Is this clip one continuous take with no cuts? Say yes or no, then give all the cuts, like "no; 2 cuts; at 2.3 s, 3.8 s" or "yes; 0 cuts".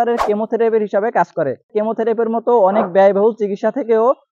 no; 1 cut; at 1.7 s